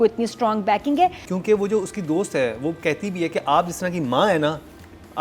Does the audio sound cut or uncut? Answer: cut